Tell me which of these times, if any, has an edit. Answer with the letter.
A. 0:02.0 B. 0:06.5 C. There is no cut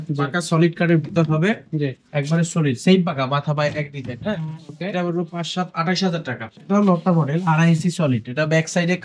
B